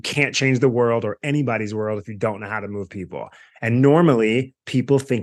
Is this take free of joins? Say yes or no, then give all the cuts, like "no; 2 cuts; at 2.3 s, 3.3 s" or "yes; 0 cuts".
yes; 0 cuts